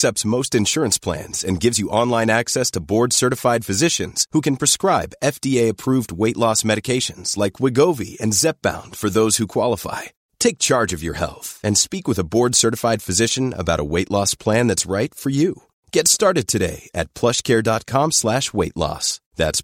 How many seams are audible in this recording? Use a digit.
0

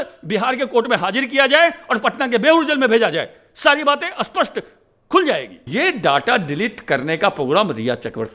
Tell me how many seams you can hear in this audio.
1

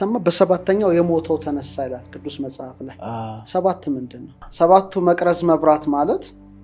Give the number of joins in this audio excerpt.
1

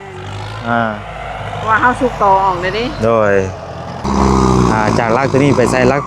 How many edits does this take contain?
1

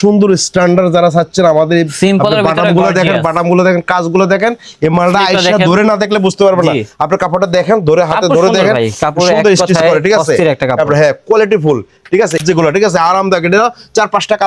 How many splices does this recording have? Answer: 1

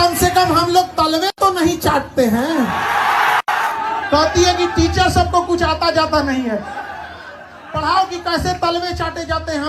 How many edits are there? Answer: 2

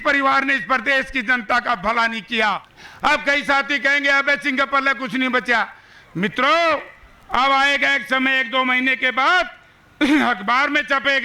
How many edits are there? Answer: 1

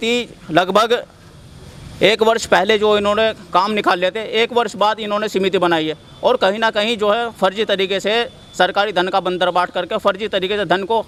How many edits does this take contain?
0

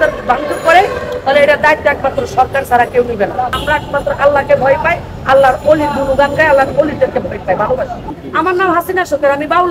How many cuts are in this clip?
2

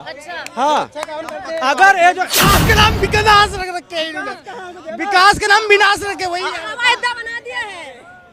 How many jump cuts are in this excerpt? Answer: 1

